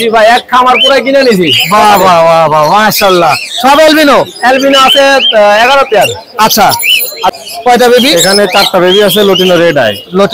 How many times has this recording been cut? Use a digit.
1